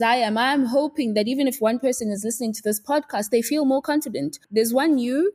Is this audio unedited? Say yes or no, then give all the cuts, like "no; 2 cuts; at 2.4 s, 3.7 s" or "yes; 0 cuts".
no; 1 cut; at 4.4 s